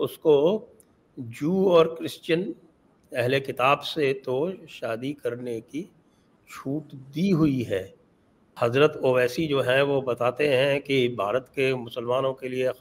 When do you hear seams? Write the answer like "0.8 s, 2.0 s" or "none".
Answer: 8.4 s